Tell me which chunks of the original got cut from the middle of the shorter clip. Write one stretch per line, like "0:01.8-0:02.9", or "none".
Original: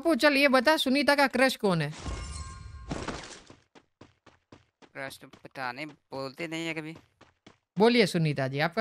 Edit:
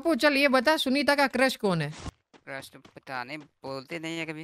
0:02.1-0:04.6